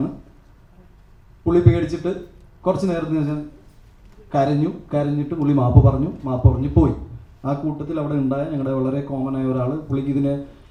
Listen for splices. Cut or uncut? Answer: uncut